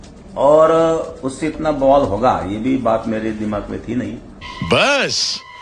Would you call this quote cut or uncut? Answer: cut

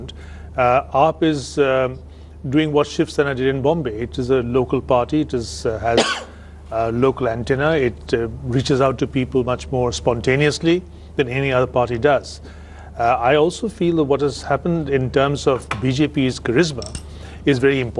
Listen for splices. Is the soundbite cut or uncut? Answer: uncut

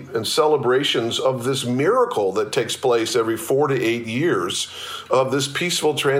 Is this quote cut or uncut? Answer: uncut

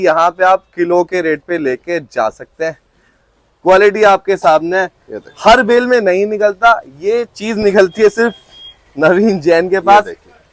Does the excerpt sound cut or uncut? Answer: uncut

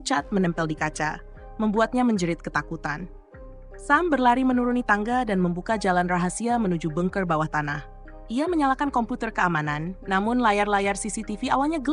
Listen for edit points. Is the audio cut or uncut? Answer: uncut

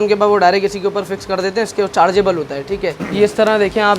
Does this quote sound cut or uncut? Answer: cut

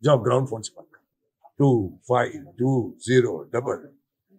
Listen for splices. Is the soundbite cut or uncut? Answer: uncut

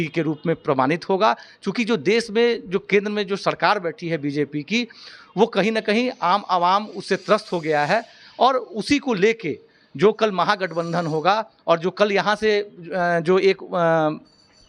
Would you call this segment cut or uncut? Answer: uncut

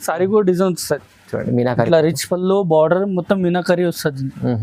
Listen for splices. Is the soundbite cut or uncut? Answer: uncut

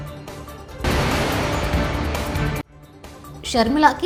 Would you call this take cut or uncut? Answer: uncut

